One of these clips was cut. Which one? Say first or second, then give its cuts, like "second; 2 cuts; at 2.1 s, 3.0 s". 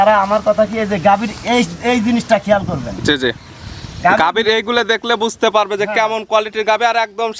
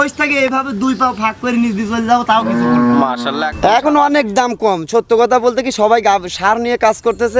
second; 1 cut; at 3.5 s